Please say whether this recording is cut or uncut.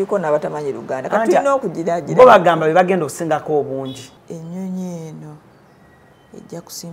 cut